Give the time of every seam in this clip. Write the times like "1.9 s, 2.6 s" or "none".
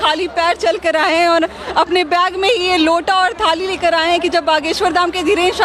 none